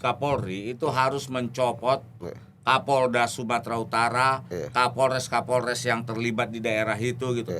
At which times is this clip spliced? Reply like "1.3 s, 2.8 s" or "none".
none